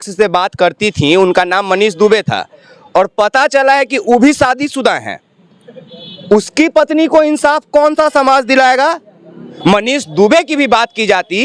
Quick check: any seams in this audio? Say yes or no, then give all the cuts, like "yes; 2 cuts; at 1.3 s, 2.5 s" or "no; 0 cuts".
yes; 1 cut; at 9.5 s